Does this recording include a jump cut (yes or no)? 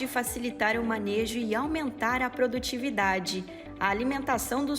yes